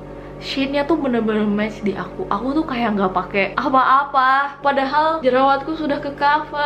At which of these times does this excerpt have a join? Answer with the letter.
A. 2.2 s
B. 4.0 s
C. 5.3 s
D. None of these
D